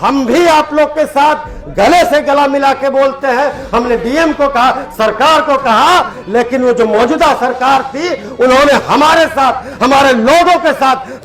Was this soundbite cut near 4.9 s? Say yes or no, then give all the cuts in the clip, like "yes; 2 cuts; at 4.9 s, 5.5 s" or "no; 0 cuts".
no; 0 cuts